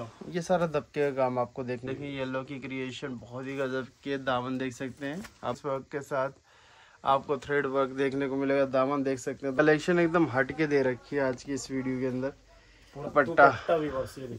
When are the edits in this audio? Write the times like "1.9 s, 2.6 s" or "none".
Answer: 1.9 s, 5.6 s, 9.6 s, 13.1 s